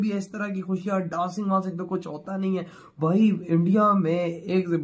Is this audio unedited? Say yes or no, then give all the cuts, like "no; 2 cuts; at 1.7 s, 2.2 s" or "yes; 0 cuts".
yes; 0 cuts